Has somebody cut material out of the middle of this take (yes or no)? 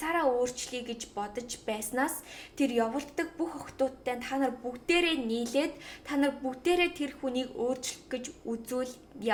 no